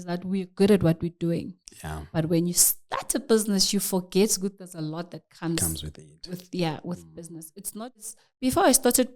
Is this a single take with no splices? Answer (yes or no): no